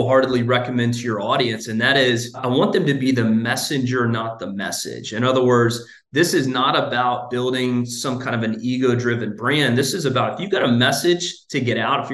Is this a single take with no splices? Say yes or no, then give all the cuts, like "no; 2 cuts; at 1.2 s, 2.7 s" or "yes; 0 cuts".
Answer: no; 1 cut; at 2.4 s